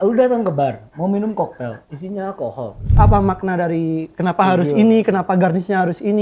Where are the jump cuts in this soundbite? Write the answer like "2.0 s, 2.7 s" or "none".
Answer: 2.9 s